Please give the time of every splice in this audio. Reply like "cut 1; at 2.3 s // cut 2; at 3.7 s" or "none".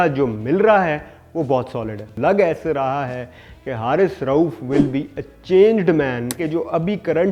cut 1; at 2.1 s // cut 2; at 6.4 s